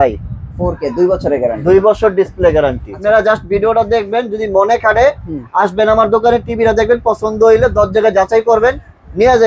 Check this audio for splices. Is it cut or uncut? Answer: cut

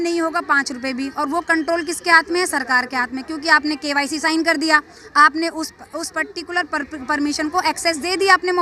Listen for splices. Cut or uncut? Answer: uncut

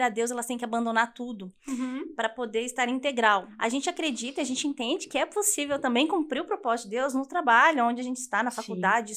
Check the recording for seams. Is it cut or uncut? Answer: cut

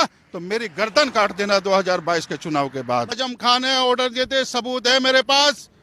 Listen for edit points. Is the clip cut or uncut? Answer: cut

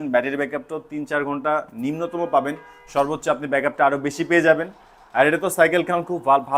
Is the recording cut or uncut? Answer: uncut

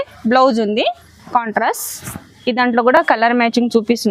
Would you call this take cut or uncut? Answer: uncut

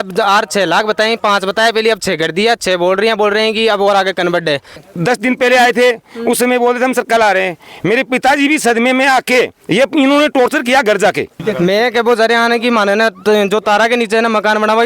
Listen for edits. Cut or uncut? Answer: cut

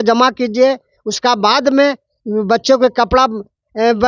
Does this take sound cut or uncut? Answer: uncut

